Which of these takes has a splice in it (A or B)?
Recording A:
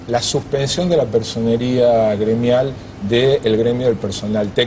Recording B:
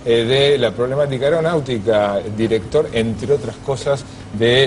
B